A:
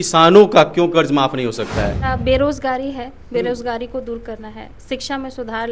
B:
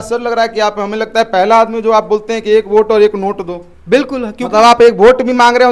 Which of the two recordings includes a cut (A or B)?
A